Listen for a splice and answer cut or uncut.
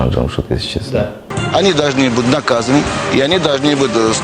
cut